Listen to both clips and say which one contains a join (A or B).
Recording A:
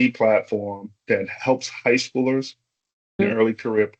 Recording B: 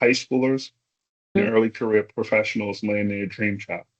A